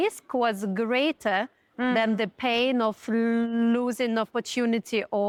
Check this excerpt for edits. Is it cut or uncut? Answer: uncut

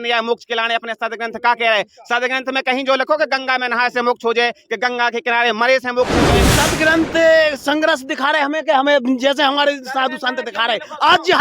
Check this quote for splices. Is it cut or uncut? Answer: cut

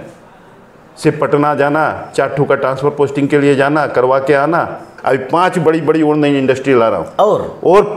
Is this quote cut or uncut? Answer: cut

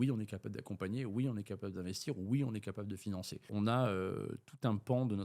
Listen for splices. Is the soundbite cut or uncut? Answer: cut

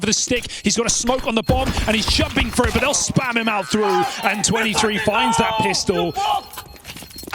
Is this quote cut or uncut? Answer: cut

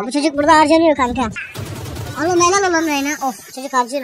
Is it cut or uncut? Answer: cut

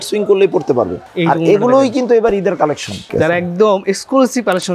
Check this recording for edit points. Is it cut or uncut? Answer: cut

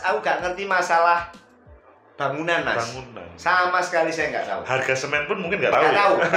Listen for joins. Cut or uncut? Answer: uncut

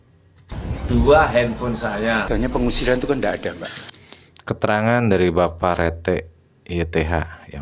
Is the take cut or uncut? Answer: cut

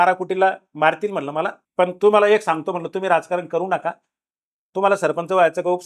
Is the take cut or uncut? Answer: cut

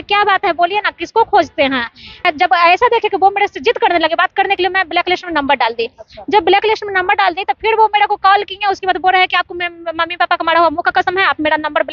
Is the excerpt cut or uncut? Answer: cut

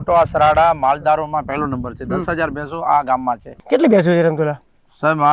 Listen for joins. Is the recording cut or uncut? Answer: cut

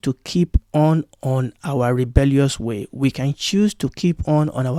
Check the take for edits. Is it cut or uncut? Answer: uncut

